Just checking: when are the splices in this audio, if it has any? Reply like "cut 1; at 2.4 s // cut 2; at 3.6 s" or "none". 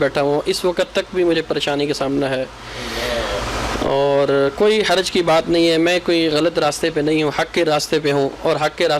none